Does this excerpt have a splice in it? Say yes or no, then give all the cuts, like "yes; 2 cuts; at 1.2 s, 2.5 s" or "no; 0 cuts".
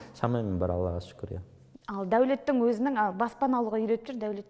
no; 0 cuts